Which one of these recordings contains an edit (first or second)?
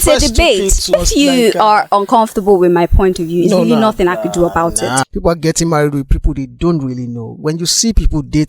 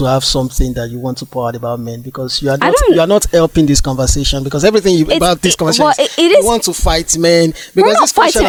first